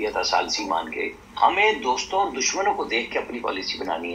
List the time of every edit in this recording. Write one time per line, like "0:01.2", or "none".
0:01.0